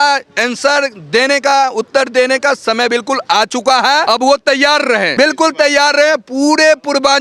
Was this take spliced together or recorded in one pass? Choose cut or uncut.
cut